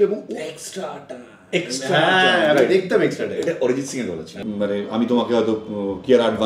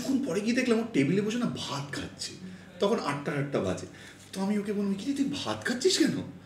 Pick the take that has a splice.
first; 1 cut; at 4.4 s

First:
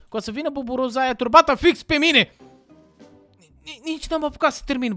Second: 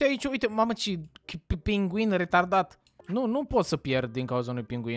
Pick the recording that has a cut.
second; 1 cut; at 2.9 s

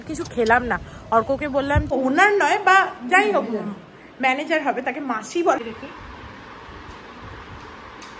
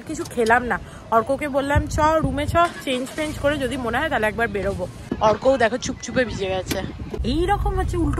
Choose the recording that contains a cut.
first; 2 cuts; at 1.9 s, 5.6 s

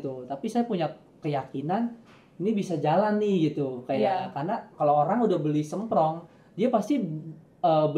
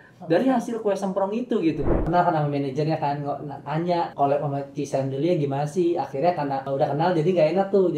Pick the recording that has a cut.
second; 3 cuts; at 2.0 s, 4.1 s, 6.7 s

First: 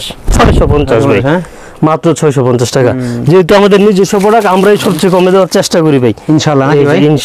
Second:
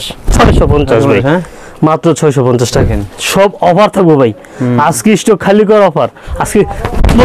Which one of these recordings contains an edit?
second; 2 cuts; at 2.8 s, 6.2 s

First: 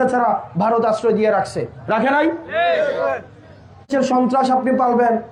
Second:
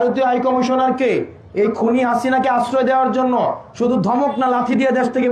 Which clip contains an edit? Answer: first; 1 cut; at 3.9 s

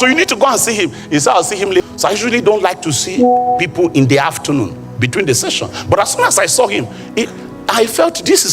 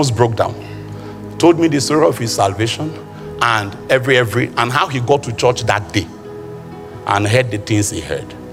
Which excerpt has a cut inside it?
first; 1 cut; at 1.8 s

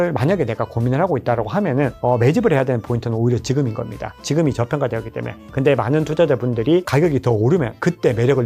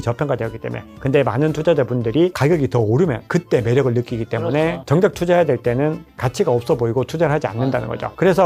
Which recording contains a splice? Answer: second; 2 cuts; at 4.9 s, 6.1 s

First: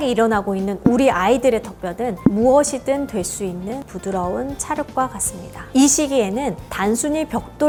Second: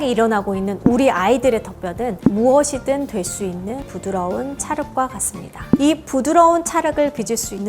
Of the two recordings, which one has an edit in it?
second; 1 cut; at 5.7 s

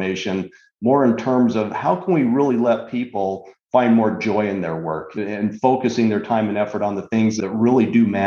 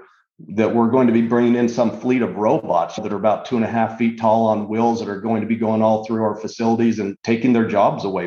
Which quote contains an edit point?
first; 2 cuts; at 5.1 s, 7.4 s

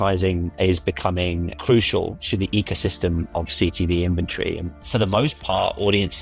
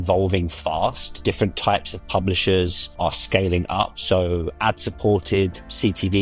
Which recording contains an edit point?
first; 2 cuts; at 1.5 s, 4.7 s

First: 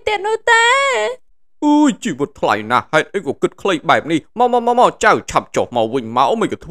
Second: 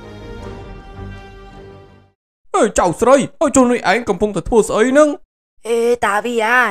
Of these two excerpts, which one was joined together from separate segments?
second; 1 cut; at 2.0 s

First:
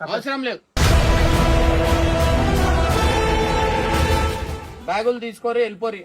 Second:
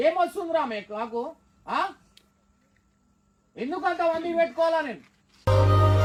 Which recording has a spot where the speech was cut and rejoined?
first; 1 cut; at 4.7 s

